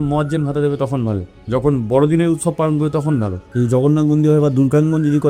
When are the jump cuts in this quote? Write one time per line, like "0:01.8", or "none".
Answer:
0:01.3
0:03.4

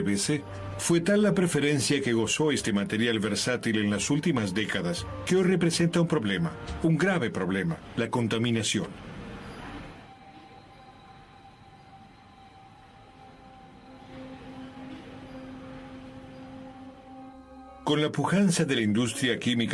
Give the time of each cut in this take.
0:07.3

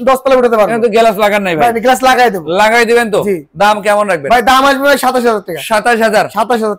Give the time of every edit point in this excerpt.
none

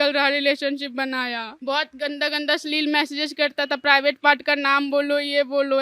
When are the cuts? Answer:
0:01.5

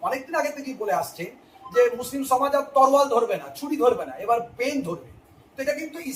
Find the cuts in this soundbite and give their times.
none

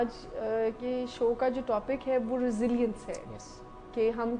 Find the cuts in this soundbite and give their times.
none

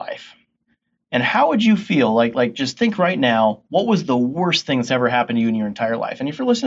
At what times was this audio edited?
none

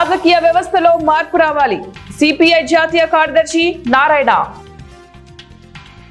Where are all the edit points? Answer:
0:04.6

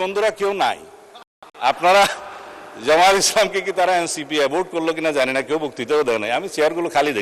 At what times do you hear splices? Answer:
none

